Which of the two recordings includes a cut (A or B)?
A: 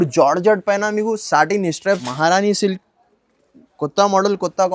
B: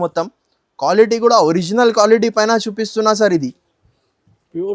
A